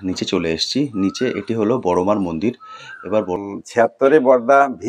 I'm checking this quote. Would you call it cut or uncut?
cut